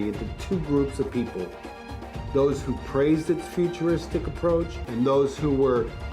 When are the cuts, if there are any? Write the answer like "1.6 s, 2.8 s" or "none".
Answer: 4.8 s